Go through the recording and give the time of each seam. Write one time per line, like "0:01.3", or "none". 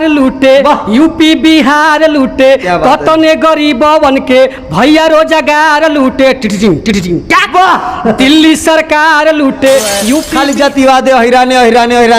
0:10.3

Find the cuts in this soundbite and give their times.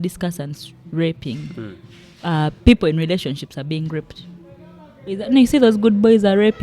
0:05.2

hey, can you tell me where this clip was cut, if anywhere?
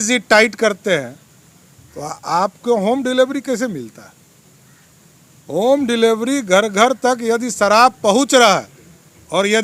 none

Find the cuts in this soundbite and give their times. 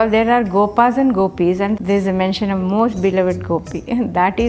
0:01.8

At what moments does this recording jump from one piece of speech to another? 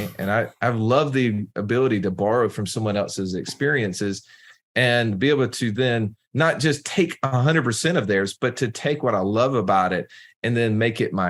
none

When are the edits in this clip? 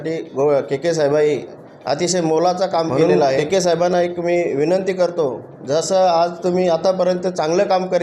0:03.4

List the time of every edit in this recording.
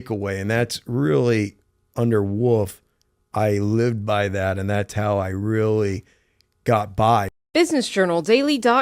0:07.3

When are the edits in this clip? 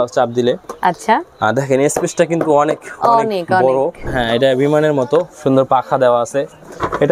0:04.1

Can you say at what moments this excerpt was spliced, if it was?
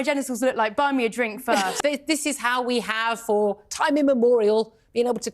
0:01.8

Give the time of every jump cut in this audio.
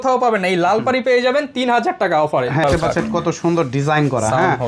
0:02.6

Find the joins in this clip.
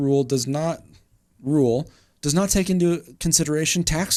none

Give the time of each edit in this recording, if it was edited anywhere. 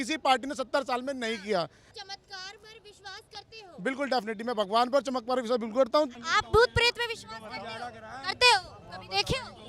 0:01.9
0:06.2

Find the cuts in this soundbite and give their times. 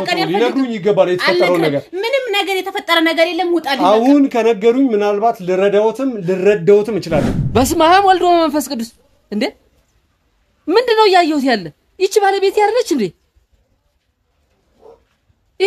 0:07.3

